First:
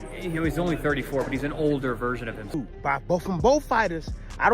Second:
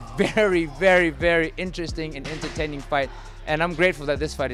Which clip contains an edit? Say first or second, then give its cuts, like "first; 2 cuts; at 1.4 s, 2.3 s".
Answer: first; 1 cut; at 2.6 s